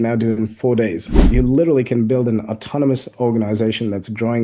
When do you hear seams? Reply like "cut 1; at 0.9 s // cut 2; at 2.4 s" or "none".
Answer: cut 1; at 1.2 s